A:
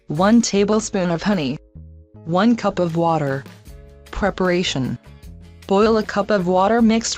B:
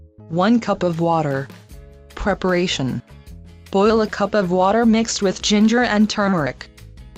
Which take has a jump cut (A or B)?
A